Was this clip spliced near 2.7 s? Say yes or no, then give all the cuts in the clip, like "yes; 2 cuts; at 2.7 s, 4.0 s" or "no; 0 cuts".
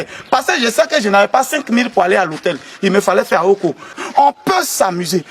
no; 1 cut; at 3.9 s